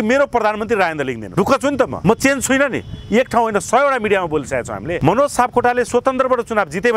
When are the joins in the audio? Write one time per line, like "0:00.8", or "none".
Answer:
0:01.2
0:01.9
0:05.0